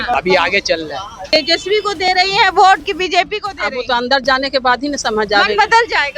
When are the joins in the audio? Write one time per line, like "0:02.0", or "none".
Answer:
0:01.3